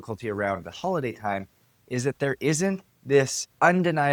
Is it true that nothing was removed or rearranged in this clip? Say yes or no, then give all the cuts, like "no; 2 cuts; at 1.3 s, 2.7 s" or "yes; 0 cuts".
yes; 0 cuts